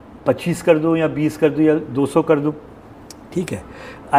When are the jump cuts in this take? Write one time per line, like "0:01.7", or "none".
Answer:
none